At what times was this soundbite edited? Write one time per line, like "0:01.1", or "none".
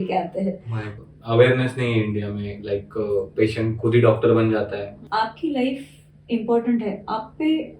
0:01.1
0:05.0